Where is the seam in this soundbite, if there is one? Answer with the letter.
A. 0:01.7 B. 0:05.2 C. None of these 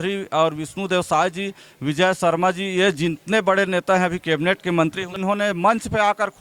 B